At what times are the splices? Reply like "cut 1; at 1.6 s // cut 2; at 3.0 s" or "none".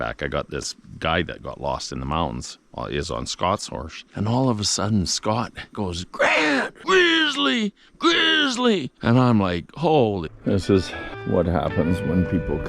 cut 1; at 5.7 s // cut 2; at 6.7 s // cut 3; at 8.9 s // cut 4; at 10.3 s